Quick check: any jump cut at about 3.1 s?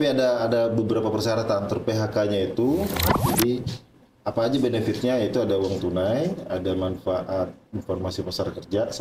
yes; 1 cut; at 3.1 s

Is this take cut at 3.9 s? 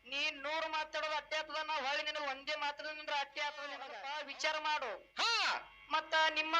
yes; 1 cut; at 3.9 s

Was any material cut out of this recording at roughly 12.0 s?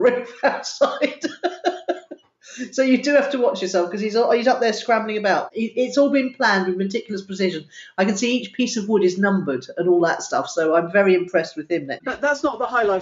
yes; 2 cuts; at 5.5 s, 12.0 s

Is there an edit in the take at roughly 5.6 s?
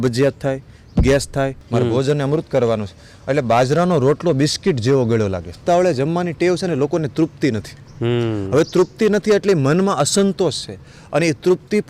yes; 2 cuts; at 1.6 s, 5.6 s

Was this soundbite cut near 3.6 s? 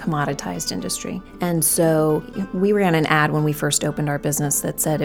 no; 2 cuts; at 1.3 s, 2.4 s

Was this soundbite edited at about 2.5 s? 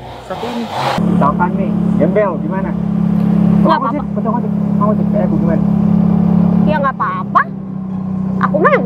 no; 1 cut; at 1.0 s

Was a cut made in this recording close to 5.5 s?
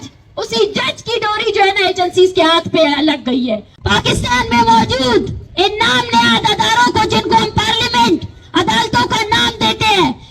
no; 1 cut; at 3.7 s

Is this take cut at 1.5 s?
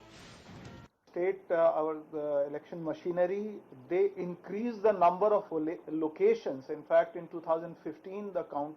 yes; 1 cut; at 1.5 s

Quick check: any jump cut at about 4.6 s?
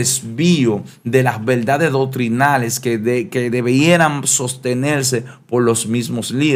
no; 0 cuts

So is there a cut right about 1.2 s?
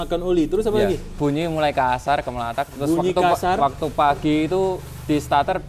yes; 1 cut; at 1.2 s

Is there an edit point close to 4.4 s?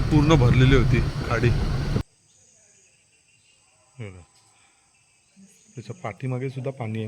no; 1 cut; at 2.1 s

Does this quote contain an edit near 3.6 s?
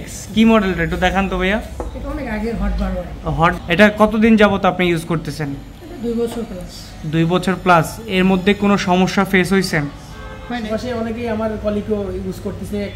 yes; 2 cuts; at 3.6 s, 10.6 s

